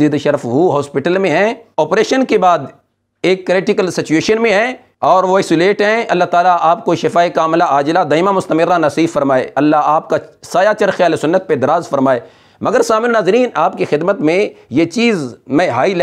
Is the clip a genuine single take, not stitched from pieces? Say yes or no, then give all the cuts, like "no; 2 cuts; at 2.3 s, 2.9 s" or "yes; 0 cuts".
yes; 0 cuts